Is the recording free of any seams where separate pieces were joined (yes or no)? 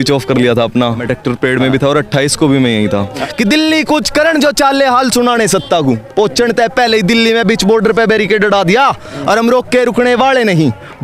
no